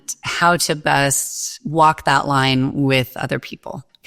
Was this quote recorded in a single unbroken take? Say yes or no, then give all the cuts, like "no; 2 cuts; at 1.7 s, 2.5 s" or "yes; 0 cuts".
no; 1 cut; at 1.5 s